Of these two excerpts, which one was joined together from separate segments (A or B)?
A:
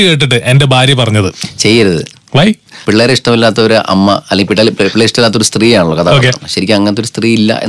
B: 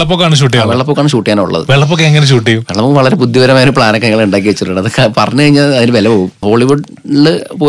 B